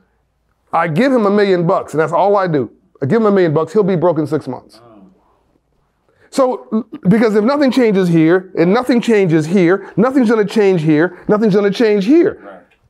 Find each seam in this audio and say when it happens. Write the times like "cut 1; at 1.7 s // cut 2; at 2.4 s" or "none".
none